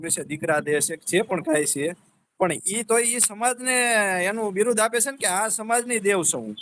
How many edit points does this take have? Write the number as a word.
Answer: zero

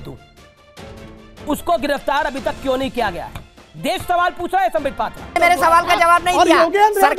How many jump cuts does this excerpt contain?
one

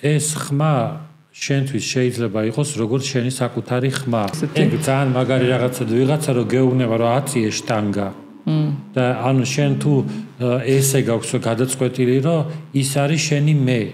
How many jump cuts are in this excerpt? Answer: one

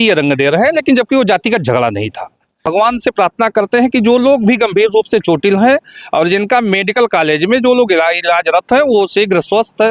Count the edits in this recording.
one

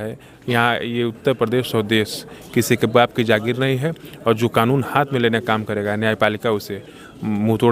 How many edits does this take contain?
zero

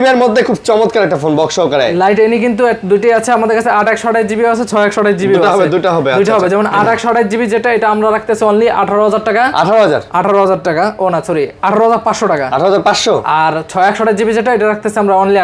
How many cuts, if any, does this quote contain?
zero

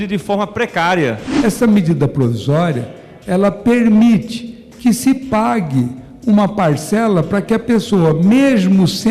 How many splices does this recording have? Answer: one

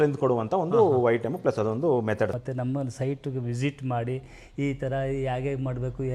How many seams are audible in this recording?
one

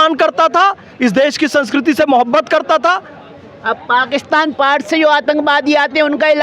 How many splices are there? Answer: zero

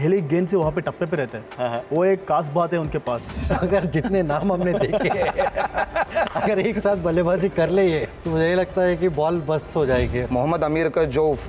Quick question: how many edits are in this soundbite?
three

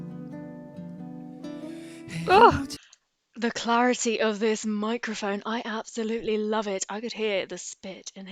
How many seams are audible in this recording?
one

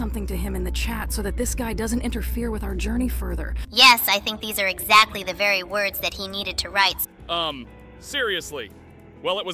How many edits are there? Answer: two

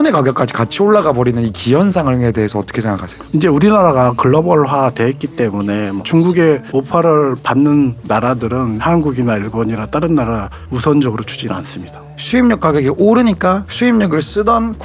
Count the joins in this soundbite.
four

